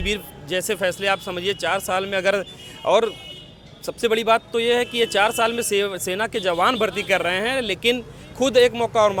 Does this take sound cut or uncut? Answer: uncut